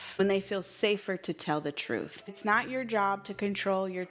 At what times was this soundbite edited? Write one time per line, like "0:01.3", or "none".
0:02.3